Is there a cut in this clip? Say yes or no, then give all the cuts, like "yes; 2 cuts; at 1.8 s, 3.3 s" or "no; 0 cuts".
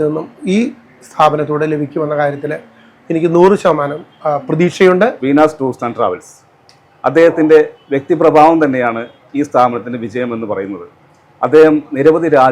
no; 0 cuts